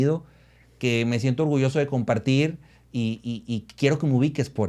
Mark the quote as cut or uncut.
uncut